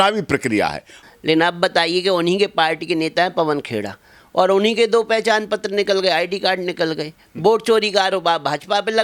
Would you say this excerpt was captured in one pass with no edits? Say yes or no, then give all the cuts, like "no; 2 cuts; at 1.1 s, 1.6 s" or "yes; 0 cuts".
no; 1 cut; at 0.9 s